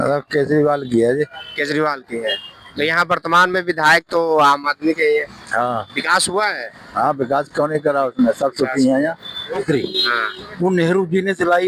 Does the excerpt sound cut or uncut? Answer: cut